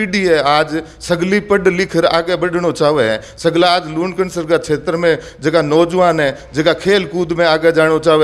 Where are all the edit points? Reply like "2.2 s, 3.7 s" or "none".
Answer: none

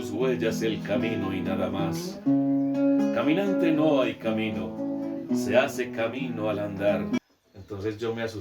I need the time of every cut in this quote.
7.2 s

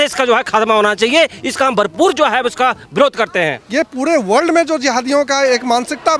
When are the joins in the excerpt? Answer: 3.6 s

